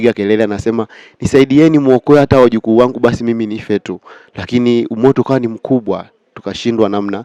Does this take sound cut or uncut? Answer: uncut